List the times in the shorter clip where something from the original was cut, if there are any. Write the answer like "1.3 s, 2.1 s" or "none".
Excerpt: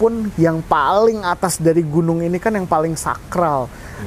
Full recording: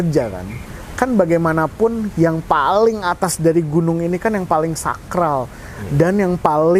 none